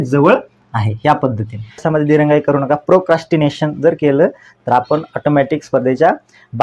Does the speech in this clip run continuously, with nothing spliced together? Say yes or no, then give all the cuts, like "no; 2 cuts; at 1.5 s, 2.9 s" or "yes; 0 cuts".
no; 1 cut; at 1.8 s